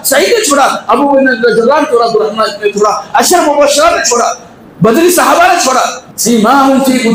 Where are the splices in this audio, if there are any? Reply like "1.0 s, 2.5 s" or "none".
6.0 s

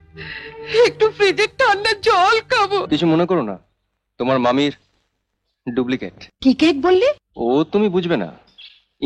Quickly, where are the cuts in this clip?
2.8 s, 6.2 s, 7.3 s

